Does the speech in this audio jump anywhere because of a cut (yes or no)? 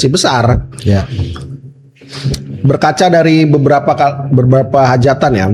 no